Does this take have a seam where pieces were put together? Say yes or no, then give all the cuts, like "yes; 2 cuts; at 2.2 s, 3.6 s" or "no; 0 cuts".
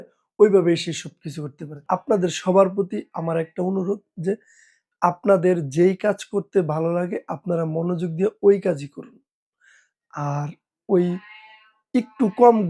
yes; 1 cut; at 1.8 s